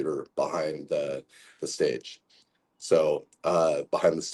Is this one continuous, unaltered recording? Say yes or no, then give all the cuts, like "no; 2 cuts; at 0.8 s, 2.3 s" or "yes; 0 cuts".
yes; 0 cuts